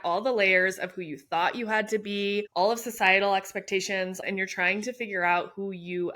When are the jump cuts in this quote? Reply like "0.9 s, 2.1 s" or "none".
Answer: 4.2 s